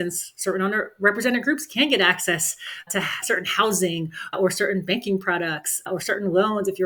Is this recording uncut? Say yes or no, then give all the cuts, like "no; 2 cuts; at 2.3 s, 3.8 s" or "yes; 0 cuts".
yes; 0 cuts